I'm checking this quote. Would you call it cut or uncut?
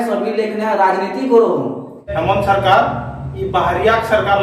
cut